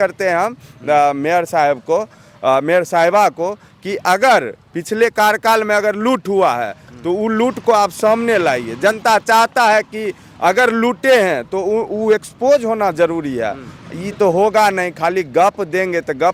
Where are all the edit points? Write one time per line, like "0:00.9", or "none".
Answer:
none